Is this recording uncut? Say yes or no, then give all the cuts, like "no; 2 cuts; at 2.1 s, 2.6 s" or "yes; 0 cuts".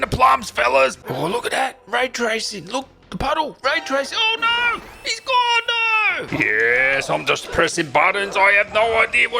no; 2 cuts; at 1.0 s, 6.2 s